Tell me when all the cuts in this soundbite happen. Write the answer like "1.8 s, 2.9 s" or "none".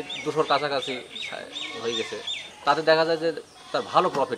2.4 s